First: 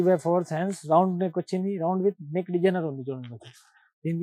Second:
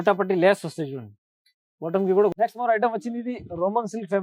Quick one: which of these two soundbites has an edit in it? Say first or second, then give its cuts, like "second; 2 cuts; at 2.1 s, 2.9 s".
second; 1 cut; at 2.3 s